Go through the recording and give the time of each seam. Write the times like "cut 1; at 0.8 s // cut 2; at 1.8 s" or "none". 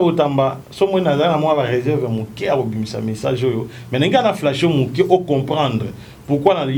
none